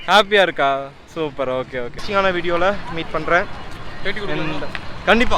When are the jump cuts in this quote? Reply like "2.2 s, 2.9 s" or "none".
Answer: 2.0 s